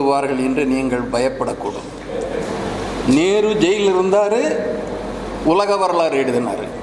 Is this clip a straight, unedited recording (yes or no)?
no